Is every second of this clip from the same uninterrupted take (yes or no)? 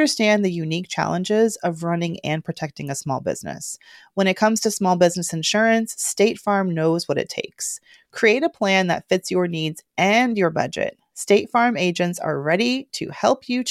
yes